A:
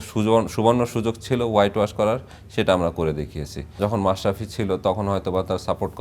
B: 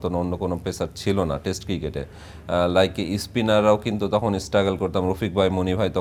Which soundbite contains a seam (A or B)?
A